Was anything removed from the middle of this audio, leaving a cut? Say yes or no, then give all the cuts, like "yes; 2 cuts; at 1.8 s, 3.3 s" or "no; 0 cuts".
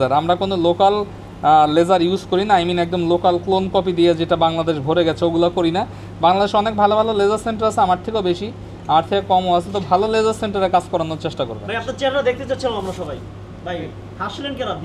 no; 0 cuts